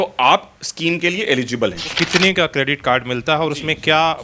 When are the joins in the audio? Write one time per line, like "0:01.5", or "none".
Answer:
0:01.9